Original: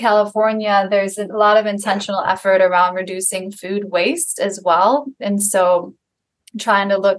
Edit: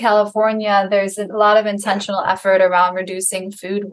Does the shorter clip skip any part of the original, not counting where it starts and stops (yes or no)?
no